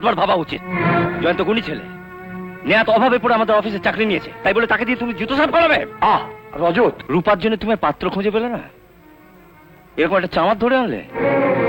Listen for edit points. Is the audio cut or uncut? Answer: cut